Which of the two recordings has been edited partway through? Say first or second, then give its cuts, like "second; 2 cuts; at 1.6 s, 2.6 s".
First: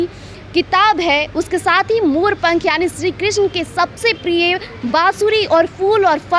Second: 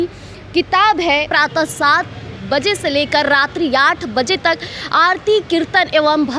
second; 1 cut; at 1.3 s